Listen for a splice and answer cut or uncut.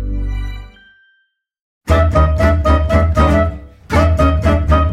cut